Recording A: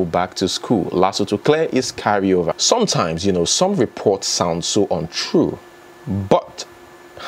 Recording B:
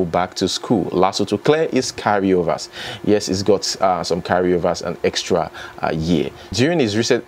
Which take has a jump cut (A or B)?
A